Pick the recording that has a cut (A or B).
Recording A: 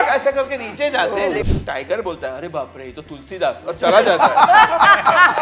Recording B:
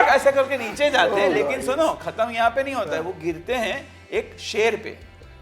A